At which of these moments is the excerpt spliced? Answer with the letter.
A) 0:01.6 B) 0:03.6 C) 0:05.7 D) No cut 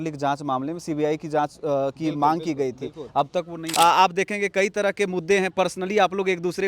B